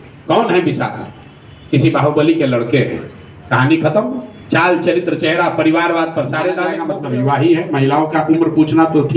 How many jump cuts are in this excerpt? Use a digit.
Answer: 1